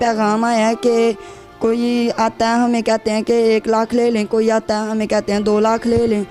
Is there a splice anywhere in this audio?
no; 0 cuts

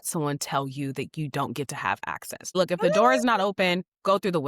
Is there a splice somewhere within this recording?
yes; 1 cut; at 2.5 s

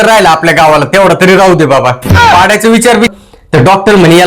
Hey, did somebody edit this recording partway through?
yes; 1 cut; at 3.1 s

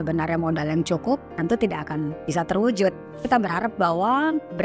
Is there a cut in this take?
yes; 2 cuts; at 2.2 s, 3.2 s

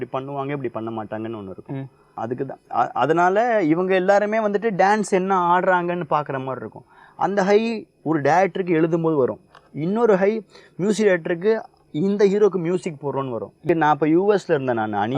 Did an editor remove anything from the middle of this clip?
yes; 2 cuts; at 2.1 s, 13.6 s

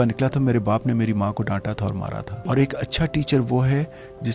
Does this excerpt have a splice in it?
yes; 1 cut; at 2.3 s

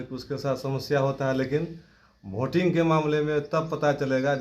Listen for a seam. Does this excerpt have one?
no; 0 cuts

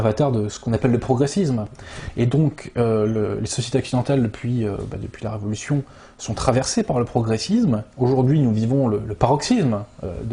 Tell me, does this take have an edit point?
no; 0 cuts

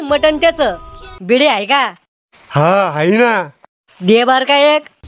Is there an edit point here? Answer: yes; 1 cut; at 1.1 s

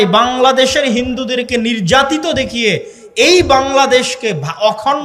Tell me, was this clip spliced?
no; 0 cuts

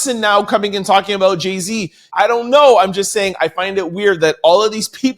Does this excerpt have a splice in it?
yes; 1 cut; at 2.1 s

